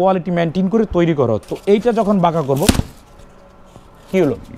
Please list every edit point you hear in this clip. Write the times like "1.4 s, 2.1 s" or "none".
1.5 s